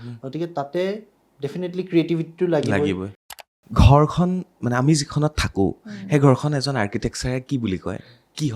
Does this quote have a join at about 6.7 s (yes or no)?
no